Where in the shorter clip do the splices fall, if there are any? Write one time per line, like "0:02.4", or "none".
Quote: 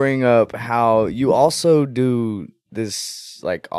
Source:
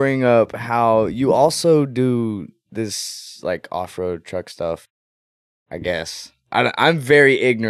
none